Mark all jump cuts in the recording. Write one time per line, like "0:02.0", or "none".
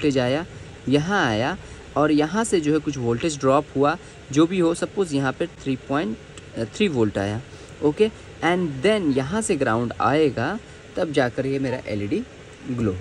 none